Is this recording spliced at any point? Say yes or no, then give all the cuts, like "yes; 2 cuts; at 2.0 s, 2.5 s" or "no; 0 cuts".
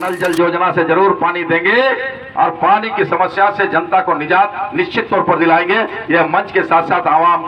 no; 0 cuts